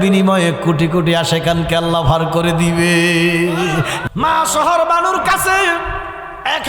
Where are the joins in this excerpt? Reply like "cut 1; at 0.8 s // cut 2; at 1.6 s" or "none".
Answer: cut 1; at 4.0 s